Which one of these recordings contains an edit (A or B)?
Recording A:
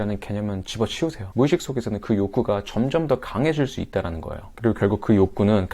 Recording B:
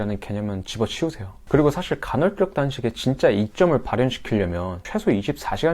A